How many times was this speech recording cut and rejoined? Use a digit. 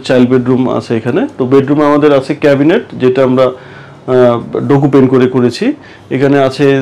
0